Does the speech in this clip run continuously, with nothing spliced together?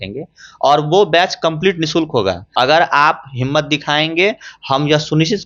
no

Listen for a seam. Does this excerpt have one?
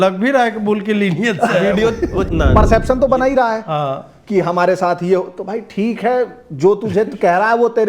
yes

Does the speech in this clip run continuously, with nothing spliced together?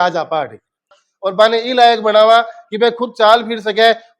no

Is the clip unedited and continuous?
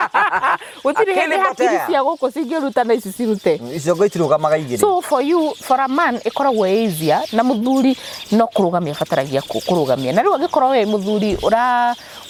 yes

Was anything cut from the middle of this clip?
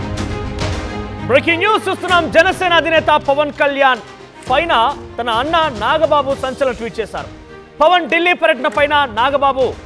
yes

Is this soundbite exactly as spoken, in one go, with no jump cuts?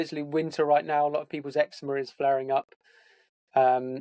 yes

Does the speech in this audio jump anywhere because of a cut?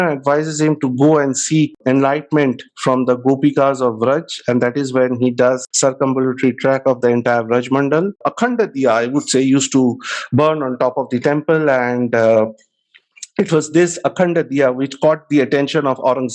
yes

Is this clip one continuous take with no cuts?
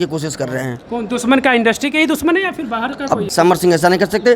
no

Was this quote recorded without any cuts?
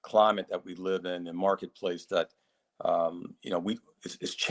yes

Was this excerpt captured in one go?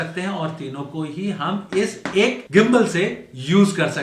no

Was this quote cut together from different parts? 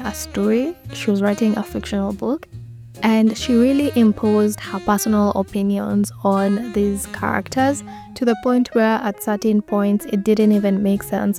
no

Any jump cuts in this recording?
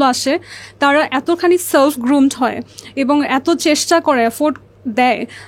no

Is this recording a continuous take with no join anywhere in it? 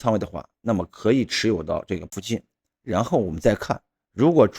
no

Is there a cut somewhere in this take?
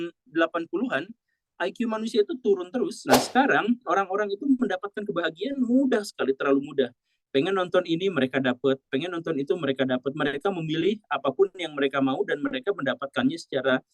yes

